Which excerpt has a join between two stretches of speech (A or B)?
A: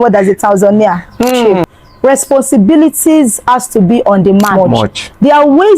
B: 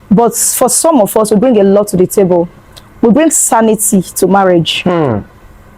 A